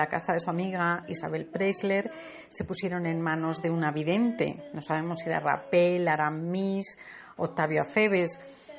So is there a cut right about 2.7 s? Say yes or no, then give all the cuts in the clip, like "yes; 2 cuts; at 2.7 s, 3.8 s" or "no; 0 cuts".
no; 0 cuts